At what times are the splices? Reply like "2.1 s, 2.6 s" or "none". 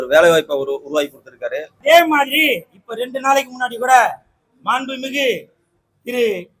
1.7 s